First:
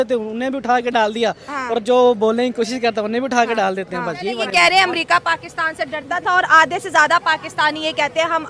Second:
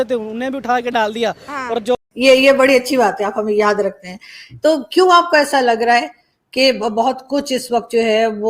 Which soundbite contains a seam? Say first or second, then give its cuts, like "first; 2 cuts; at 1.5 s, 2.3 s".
second; 1 cut; at 1.9 s